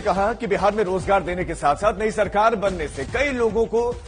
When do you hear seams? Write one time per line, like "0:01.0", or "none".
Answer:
none